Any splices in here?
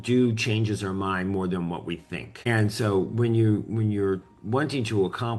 yes; 1 cut; at 2.3 s

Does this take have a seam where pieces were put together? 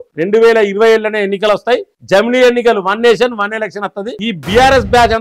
yes; 1 cut; at 4.1 s

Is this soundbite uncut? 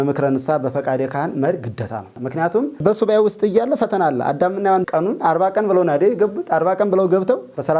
yes; 0 cuts

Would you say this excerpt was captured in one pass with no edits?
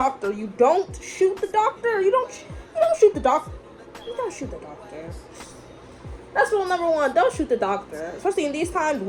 yes; 0 cuts

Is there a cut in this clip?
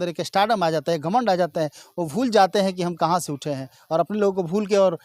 no; 0 cuts

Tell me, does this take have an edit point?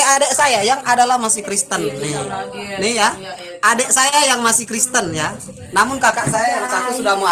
no; 0 cuts

